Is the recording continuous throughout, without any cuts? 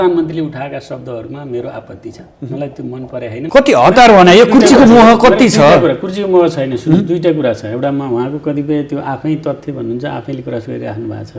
no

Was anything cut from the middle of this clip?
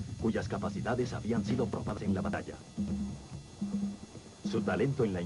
yes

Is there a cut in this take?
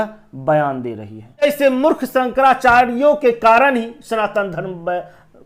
yes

